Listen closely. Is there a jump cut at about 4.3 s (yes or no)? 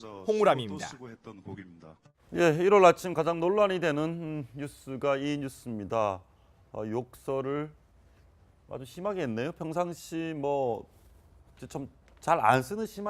yes